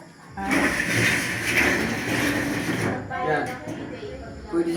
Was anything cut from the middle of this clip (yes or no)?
no